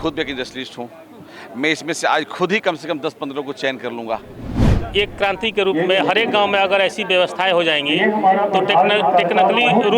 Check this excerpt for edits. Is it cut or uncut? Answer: cut